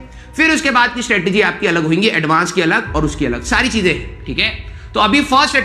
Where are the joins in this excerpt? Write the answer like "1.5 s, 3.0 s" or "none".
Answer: none